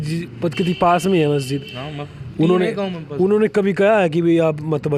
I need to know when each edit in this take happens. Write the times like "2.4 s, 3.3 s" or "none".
none